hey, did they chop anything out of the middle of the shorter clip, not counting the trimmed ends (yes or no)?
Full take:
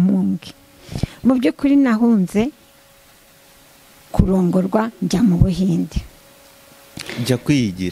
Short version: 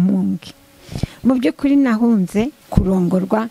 yes